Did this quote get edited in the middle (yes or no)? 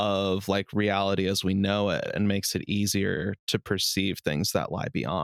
no